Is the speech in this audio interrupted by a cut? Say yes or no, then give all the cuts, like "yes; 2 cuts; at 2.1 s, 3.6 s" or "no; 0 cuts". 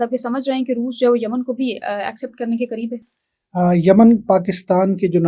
no; 0 cuts